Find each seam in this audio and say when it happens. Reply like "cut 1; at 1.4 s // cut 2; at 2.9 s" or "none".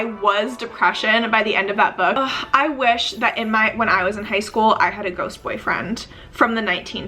cut 1; at 2.2 s